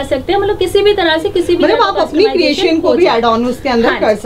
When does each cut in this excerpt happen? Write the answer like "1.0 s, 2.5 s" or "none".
none